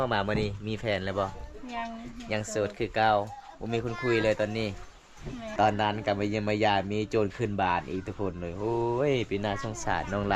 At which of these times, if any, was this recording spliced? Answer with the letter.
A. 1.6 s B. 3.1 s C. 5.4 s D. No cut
C